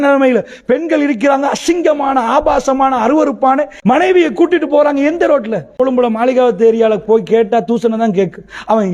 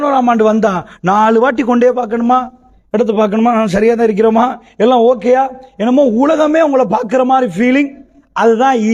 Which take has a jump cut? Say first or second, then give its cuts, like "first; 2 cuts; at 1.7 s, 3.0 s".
first; 2 cuts; at 3.7 s, 5.7 s